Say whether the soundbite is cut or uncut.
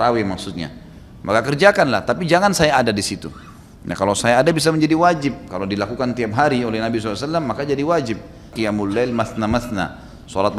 cut